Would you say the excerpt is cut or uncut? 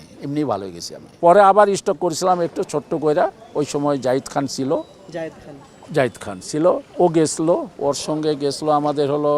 cut